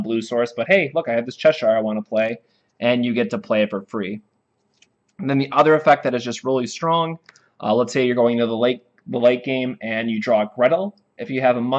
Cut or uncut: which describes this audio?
cut